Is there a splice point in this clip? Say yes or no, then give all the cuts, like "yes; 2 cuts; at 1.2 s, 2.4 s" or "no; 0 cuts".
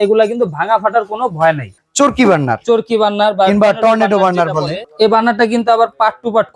yes; 2 cuts; at 1.8 s, 4.8 s